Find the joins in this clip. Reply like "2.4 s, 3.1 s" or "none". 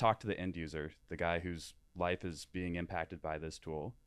none